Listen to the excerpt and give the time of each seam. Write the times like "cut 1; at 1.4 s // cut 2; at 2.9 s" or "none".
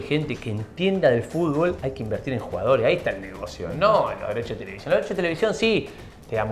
cut 1; at 1.9 s